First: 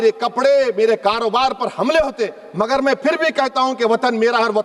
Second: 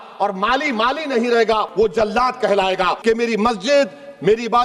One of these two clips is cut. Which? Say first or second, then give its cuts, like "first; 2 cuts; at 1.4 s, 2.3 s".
second; 2 cuts; at 1.7 s, 3.0 s